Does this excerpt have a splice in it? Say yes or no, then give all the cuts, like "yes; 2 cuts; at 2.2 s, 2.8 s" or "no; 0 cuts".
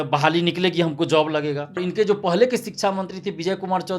yes; 1 cut; at 1.8 s